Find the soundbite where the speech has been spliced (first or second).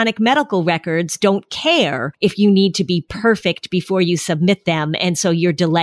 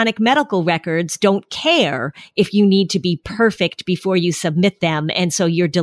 first